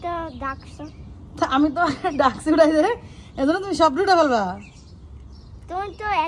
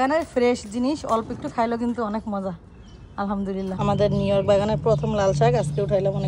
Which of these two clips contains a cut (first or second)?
second